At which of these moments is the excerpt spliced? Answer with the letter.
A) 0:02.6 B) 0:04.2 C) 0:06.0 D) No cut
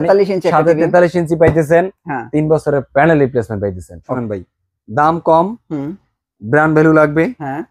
B